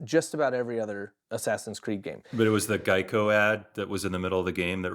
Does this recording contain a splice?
yes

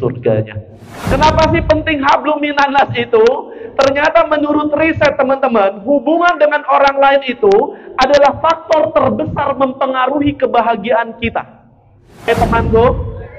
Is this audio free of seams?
no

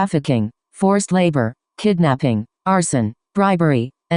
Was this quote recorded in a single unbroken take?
no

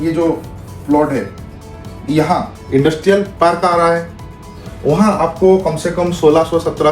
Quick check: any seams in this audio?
yes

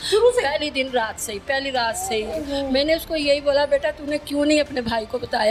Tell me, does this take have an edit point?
no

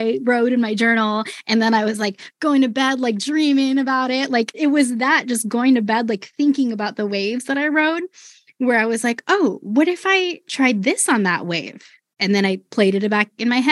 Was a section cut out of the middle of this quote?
yes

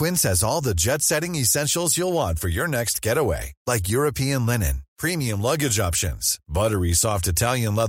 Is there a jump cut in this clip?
no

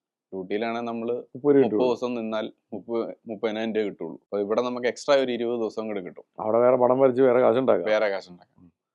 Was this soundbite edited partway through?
yes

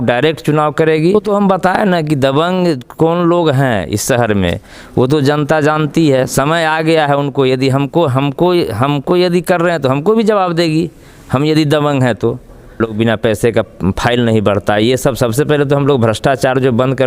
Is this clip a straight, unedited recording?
no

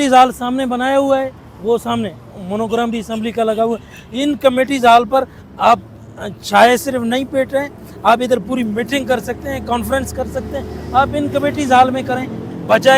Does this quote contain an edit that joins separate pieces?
no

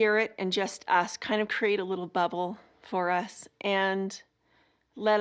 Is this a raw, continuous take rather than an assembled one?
yes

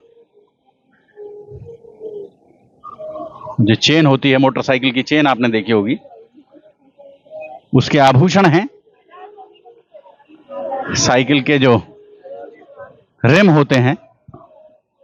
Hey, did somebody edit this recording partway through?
no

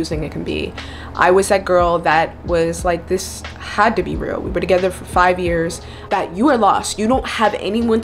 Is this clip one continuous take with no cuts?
no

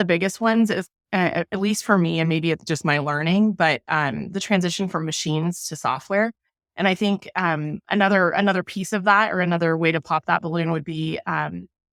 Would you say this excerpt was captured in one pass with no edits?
yes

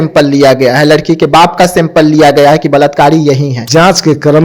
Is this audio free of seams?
no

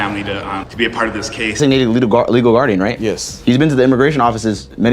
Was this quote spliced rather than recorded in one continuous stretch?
yes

